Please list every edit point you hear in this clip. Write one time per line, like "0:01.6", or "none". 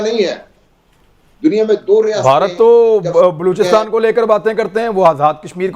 none